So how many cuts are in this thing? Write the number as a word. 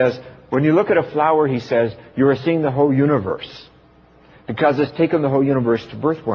one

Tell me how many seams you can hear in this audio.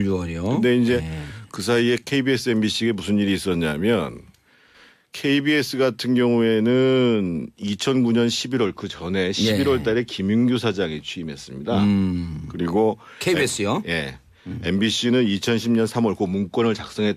one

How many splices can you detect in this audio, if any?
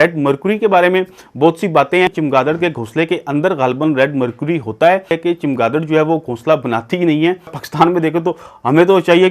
three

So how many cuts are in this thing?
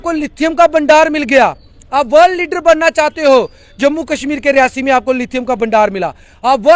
zero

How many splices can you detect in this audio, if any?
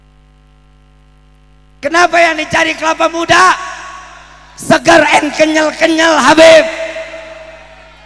one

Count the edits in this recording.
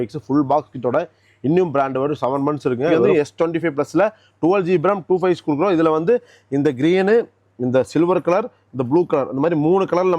one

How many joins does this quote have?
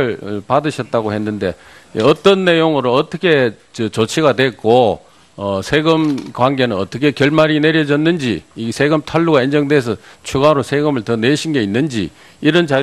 zero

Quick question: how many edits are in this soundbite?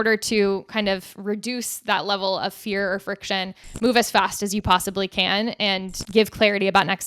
one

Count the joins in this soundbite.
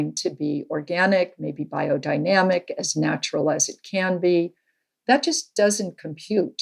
zero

